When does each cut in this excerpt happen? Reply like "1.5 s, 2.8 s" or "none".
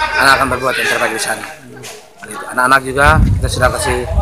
none